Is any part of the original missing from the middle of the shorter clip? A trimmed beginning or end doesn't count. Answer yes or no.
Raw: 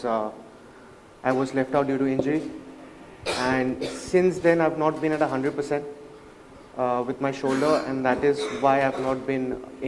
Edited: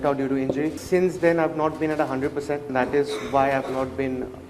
yes